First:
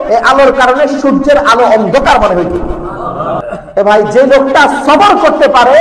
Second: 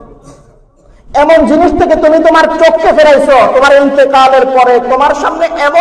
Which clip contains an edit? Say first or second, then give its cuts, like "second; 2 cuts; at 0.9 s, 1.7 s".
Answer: first; 1 cut; at 3.4 s